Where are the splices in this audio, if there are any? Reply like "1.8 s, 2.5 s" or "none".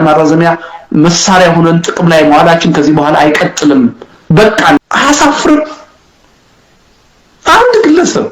4.8 s